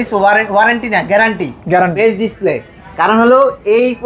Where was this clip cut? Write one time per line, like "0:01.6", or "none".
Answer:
0:01.9